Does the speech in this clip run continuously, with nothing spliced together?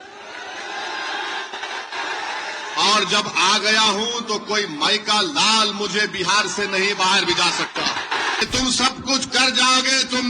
no; 1 cut; at 8.4 s

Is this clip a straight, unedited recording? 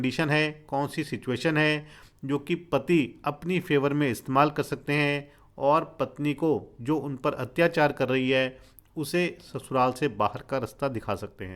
yes; 0 cuts

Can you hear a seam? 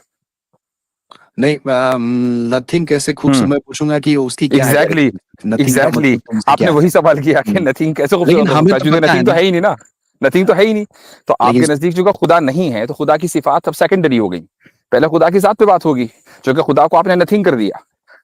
no; 0 cuts

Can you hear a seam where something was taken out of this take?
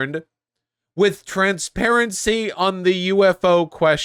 no; 0 cuts

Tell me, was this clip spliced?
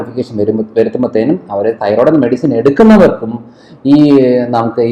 no; 0 cuts

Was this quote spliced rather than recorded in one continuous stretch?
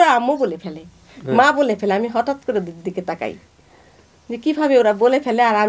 no; 0 cuts

